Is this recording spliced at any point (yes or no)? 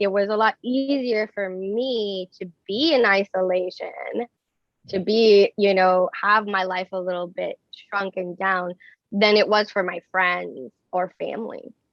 no